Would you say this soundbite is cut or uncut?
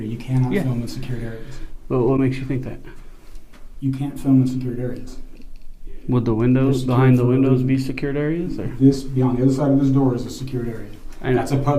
uncut